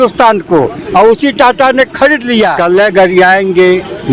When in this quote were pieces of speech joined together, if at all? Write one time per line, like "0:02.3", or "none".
0:02.6